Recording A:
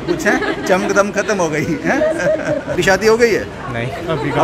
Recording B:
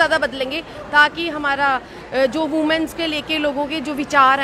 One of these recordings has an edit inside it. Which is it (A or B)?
A